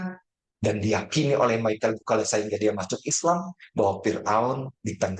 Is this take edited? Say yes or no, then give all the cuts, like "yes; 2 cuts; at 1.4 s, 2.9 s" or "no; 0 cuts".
no; 0 cuts